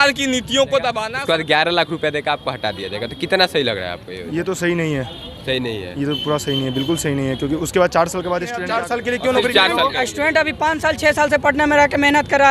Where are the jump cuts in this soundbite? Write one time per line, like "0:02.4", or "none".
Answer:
0:01.1
0:08.7